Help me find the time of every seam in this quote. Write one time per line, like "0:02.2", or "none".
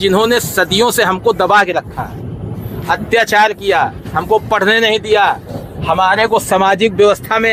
none